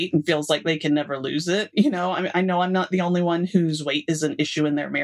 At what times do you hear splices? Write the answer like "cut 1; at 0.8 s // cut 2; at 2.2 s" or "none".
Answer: none